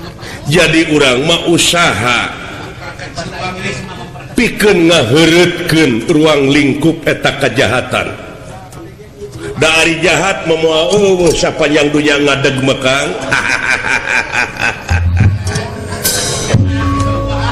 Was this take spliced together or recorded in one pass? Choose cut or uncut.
uncut